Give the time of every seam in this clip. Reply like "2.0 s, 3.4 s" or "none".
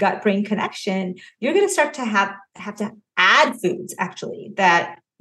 none

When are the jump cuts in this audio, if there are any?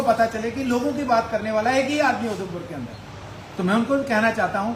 none

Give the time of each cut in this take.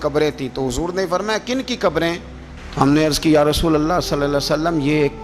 none

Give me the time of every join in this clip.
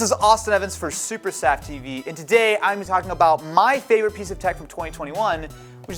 none

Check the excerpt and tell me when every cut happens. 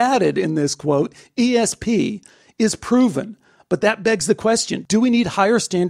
none

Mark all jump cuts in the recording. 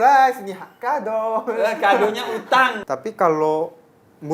2.8 s

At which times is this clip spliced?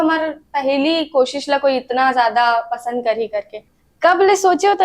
3.6 s

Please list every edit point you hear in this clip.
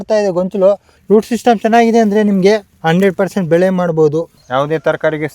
0.9 s, 2.7 s, 4.4 s

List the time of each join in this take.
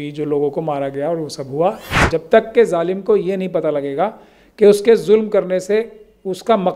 2.0 s

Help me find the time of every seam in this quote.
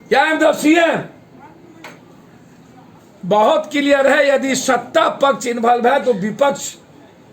3.0 s

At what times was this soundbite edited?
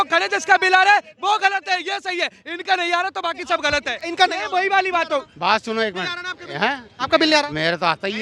none

